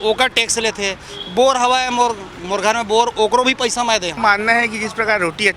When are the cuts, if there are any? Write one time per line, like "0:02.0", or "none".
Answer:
0:04.2